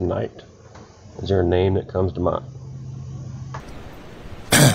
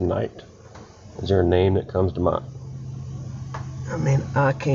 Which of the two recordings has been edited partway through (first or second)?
first